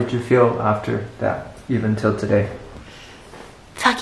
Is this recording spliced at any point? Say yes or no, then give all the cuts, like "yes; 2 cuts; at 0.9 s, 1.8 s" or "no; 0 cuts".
no; 0 cuts